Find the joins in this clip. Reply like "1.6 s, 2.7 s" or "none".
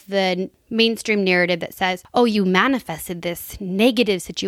2.0 s